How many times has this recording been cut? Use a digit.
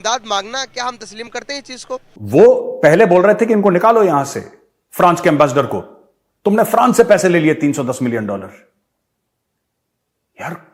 1